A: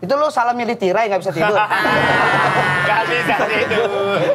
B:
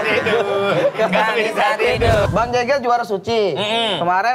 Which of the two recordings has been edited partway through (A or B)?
B